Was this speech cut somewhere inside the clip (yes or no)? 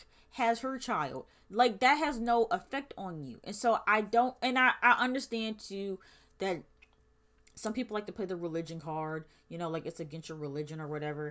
no